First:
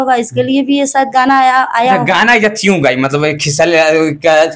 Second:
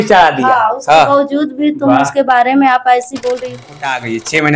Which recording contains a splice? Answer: second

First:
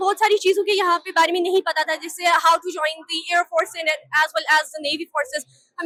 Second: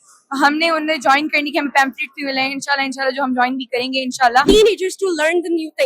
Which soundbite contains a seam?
second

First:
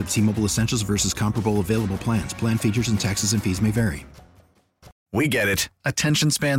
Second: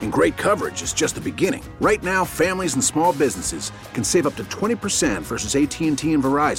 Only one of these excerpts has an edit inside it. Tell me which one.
first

